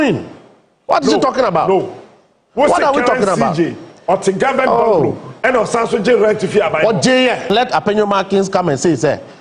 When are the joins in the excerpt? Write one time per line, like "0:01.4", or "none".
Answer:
0:07.5